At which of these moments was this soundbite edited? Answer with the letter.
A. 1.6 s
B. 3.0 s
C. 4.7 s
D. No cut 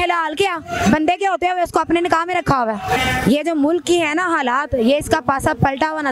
B